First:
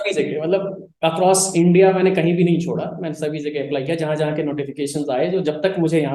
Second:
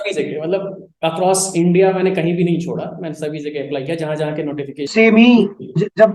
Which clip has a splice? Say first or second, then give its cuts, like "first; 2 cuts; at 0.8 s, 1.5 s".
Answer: second; 1 cut; at 4.9 s